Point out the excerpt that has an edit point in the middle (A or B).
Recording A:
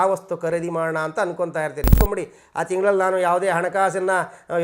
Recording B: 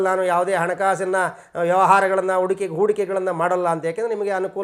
A